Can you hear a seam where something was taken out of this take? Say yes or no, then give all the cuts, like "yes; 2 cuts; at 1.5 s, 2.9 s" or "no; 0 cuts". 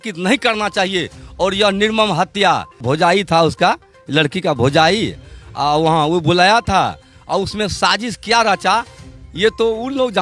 yes; 1 cut; at 2.8 s